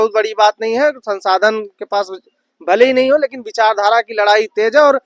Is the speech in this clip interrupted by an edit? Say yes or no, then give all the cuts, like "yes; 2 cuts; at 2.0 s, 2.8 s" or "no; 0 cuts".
no; 0 cuts